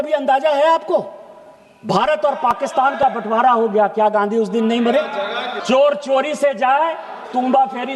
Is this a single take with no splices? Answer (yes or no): no